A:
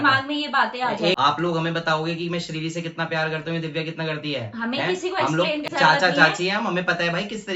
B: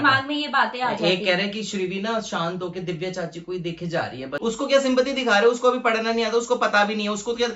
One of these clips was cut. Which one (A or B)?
A